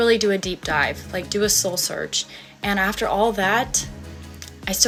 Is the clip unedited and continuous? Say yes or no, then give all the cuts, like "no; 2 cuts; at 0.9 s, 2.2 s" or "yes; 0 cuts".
yes; 0 cuts